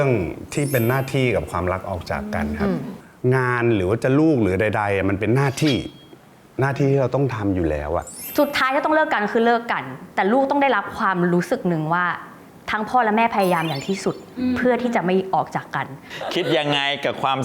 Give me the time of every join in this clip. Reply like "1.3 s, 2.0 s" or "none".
2.9 s, 8.2 s, 16.0 s